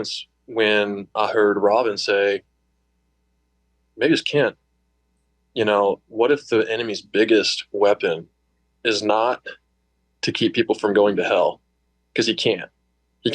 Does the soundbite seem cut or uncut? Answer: uncut